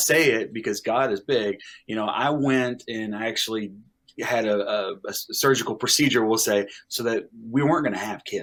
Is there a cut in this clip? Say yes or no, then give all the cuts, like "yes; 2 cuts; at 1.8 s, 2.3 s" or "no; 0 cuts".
no; 0 cuts